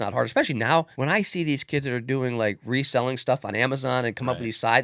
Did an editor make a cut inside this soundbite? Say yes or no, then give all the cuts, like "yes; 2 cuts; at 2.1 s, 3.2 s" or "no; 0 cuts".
yes; 1 cut; at 0.9 s